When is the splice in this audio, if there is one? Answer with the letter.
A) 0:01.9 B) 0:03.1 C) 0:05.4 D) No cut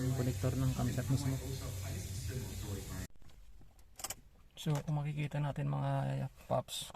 B